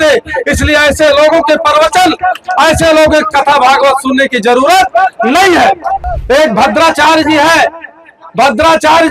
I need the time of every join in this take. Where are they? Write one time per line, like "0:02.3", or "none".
0:06.1

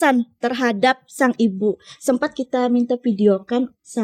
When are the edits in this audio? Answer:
none

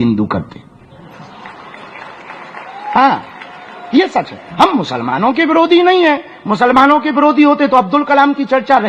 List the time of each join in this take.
none

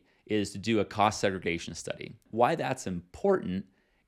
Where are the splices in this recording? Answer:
0:02.2

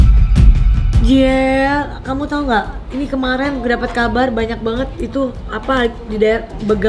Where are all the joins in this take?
0:00.9

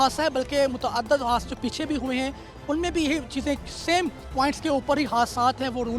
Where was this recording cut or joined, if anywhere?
0:04.2

